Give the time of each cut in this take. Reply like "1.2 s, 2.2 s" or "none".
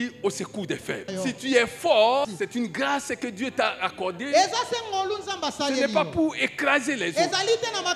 1.1 s, 2.2 s